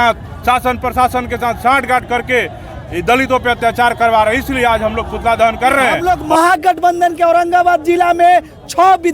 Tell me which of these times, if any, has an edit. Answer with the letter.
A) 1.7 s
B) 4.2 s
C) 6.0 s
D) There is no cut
C